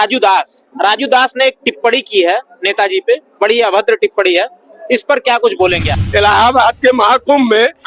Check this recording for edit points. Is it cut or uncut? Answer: cut